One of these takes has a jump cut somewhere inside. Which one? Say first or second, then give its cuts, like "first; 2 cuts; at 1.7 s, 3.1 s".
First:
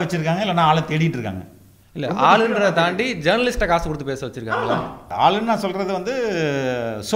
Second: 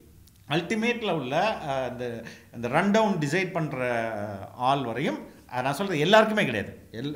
first; 1 cut; at 4.5 s